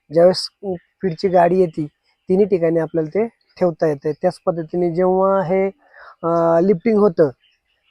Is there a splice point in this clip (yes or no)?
no